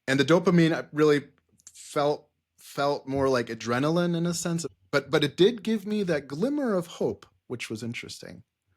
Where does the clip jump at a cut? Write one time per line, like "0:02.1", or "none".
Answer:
0:04.7

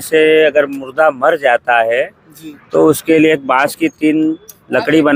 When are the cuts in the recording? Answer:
none

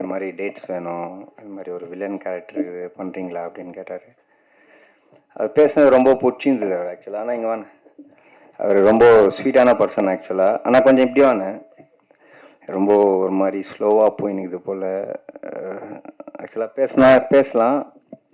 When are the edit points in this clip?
none

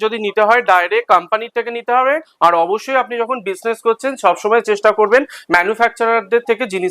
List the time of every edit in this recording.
none

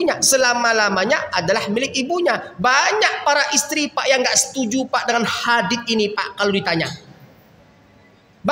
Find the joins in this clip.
none

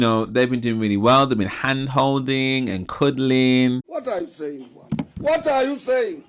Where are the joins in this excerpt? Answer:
none

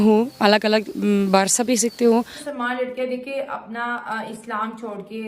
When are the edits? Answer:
0:02.4

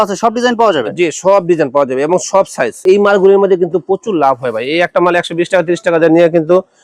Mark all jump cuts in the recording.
0:02.8

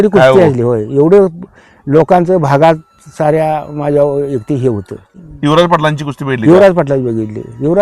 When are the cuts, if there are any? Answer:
0:05.1

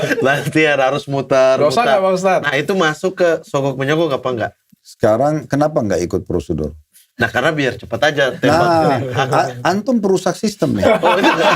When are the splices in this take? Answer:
none

